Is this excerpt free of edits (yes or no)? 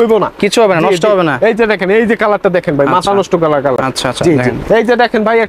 yes